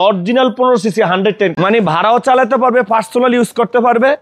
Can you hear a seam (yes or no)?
yes